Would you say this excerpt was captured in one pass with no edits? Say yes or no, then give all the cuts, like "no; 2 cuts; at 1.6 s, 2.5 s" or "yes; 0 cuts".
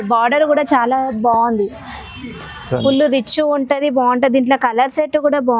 no; 1 cut; at 2.8 s